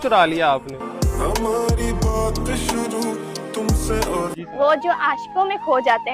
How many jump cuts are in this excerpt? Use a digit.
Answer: 1